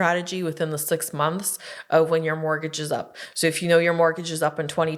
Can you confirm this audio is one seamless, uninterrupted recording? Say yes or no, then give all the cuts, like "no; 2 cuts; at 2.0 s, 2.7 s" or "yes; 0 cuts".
yes; 0 cuts